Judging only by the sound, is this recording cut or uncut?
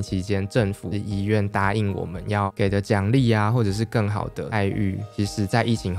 cut